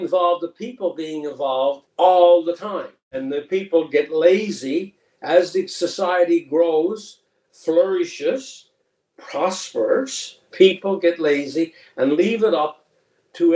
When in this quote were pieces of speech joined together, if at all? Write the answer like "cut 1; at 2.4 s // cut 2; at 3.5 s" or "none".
cut 1; at 3.1 s